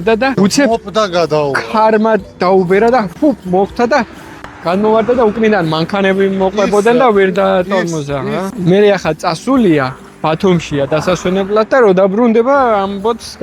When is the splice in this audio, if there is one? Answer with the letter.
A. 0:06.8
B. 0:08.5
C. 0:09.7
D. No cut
D